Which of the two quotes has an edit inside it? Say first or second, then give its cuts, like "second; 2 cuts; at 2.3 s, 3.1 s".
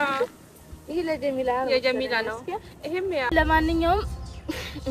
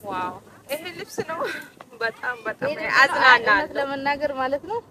first; 1 cut; at 3.3 s